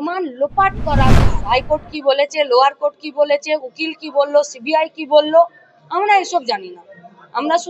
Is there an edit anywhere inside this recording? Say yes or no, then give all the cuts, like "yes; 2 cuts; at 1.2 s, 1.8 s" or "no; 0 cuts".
yes; 1 cut; at 1.4 s